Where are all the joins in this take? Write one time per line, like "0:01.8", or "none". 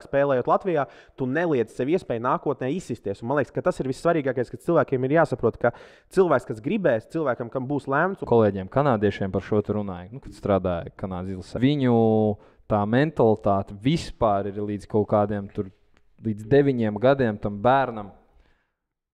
0:08.2
0:11.6